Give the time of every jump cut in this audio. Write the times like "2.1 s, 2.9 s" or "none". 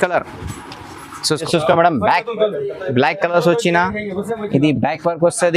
1.4 s